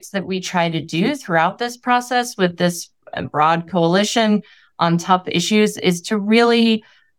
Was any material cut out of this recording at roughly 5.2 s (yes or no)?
no